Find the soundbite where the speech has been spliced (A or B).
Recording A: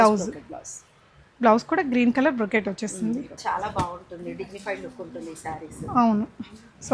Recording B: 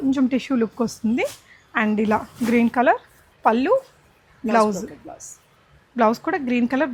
A